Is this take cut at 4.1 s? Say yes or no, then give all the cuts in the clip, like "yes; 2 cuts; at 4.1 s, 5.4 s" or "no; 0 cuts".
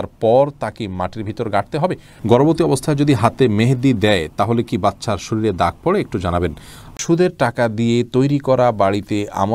no; 2 cuts; at 2.1 s, 6.9 s